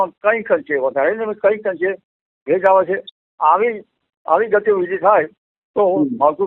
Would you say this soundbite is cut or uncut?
uncut